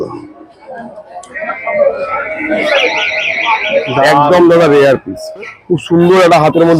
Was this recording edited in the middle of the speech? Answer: yes; 1 cut; at 5.6 s

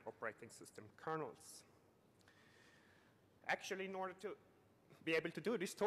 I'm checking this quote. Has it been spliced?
no; 0 cuts

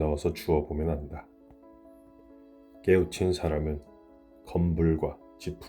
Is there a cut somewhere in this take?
yes; 2 cuts; at 1.2 s, 2.8 s

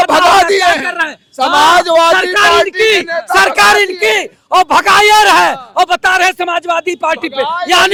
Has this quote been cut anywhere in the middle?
no; 0 cuts

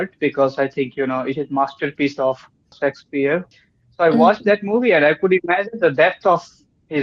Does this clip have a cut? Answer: yes; 2 cuts; at 2.7 s, 3.6 s

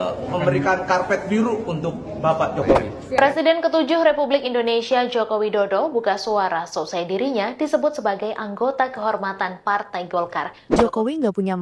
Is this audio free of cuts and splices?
no; 2 cuts; at 3.0 s, 10.6 s

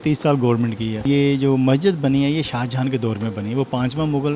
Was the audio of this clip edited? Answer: yes; 1 cut; at 1.1 s

